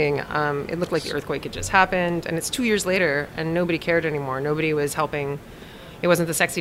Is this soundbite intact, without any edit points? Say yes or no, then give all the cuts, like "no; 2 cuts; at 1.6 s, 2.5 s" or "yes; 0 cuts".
yes; 0 cuts